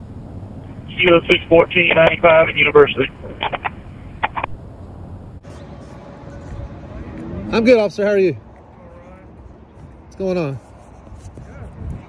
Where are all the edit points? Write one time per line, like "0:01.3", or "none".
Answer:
none